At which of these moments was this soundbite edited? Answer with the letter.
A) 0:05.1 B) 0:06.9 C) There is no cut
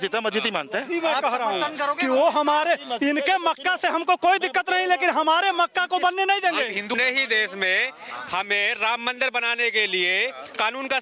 B